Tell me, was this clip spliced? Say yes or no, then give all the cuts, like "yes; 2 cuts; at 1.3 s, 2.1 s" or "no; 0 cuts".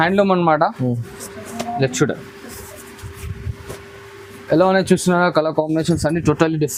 no; 0 cuts